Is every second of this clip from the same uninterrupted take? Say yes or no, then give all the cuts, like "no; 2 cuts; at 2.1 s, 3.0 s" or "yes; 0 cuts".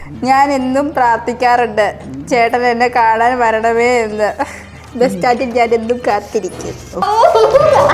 no; 1 cut; at 7.0 s